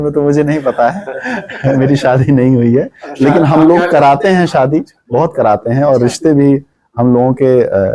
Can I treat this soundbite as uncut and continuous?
yes; 0 cuts

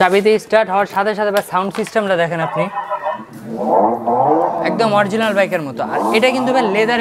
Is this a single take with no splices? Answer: yes; 0 cuts

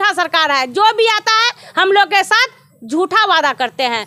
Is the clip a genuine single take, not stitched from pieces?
yes; 0 cuts

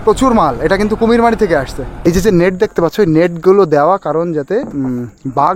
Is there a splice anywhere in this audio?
yes; 1 cut; at 2.1 s

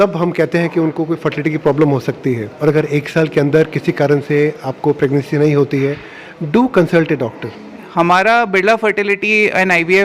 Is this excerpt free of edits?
no; 2 cuts; at 2.5 s, 7.8 s

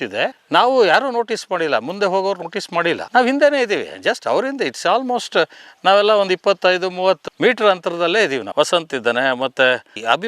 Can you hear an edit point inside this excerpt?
yes; 1 cut; at 8.5 s

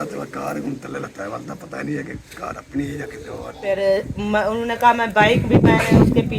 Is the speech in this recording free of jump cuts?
no; 1 cut; at 3.6 s

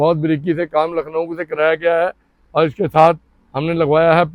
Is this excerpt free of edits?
yes; 0 cuts

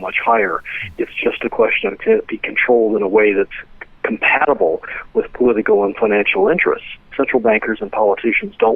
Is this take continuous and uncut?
no; 1 cut; at 7.0 s

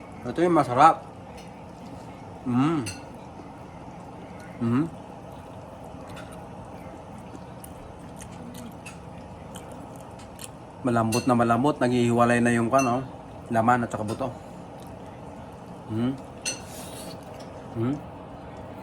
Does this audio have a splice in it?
no; 0 cuts

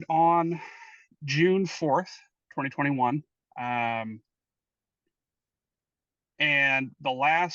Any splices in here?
no; 0 cuts

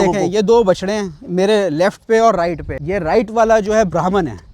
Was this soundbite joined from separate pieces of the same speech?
yes; 1 cut; at 2.7 s

